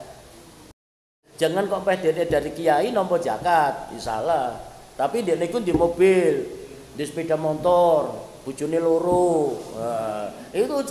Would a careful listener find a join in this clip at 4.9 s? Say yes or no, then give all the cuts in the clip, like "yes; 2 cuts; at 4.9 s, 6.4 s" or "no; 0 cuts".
no; 1 cut; at 1.2 s